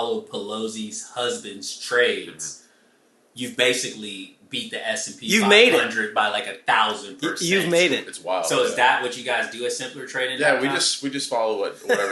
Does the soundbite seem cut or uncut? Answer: uncut